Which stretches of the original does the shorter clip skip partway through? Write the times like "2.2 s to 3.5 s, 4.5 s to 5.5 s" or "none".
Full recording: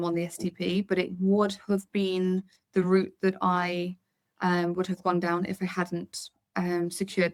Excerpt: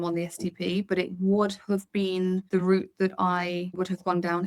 2.4 s to 2.7 s, 4.0 s to 4.7 s